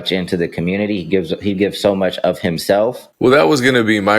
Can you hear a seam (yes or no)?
yes